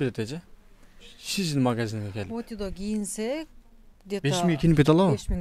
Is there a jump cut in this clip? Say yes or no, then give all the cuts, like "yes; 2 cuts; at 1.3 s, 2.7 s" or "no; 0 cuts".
no; 0 cuts